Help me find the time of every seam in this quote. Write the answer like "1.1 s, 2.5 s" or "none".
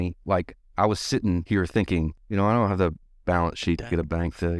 1.4 s, 2.2 s